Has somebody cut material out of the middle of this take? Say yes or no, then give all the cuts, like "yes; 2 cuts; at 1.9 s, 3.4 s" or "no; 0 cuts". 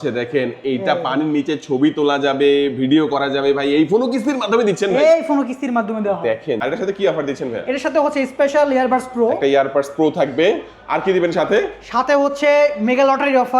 yes; 1 cut; at 6.6 s